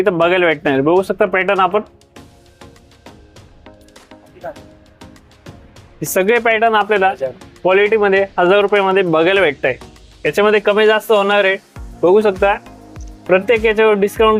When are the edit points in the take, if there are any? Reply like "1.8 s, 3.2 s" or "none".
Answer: none